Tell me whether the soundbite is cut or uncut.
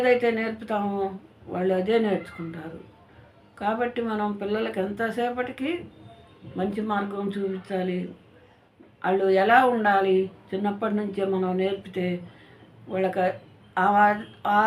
uncut